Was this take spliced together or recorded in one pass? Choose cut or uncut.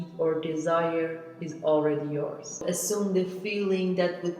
cut